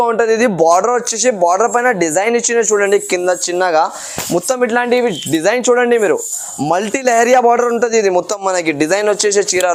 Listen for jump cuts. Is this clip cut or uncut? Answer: uncut